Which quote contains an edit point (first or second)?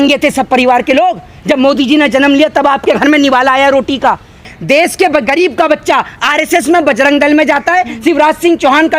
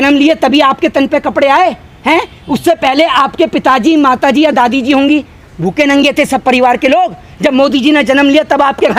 first